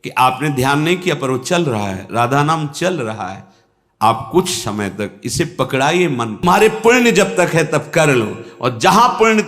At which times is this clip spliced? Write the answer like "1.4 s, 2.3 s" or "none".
6.4 s